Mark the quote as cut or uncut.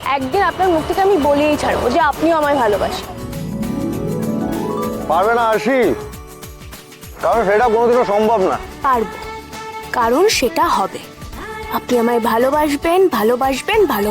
cut